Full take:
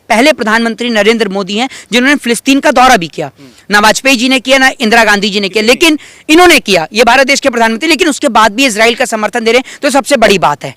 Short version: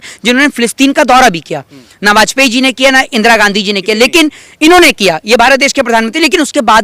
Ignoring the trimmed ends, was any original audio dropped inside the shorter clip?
no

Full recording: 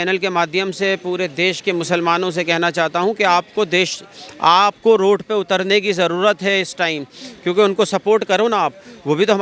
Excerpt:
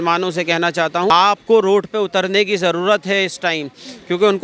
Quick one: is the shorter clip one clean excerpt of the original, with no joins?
no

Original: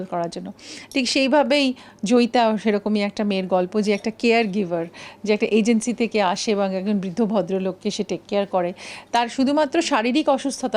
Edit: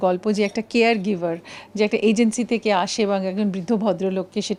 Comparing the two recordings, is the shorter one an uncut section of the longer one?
yes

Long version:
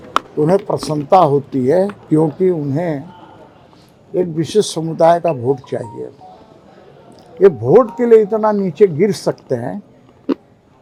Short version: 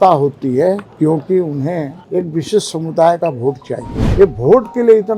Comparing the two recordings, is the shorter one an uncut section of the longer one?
no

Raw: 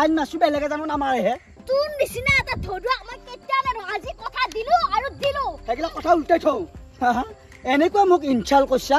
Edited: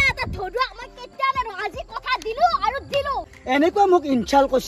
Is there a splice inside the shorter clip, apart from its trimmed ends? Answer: yes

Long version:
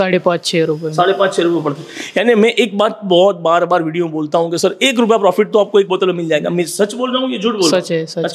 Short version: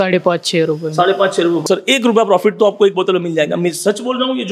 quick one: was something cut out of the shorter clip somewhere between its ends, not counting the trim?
yes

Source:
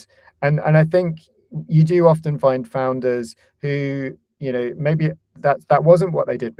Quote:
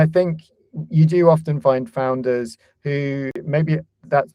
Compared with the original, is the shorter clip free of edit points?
no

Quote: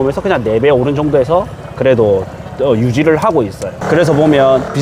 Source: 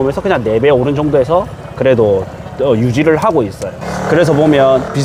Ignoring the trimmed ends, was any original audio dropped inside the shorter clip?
yes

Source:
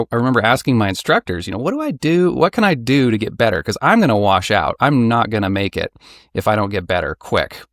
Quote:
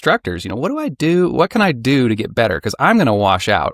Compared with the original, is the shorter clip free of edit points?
yes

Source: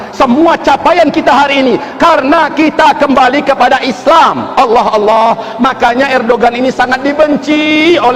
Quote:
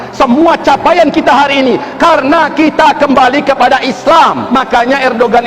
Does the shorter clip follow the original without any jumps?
no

